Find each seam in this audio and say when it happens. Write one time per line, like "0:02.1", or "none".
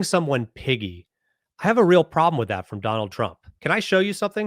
0:03.5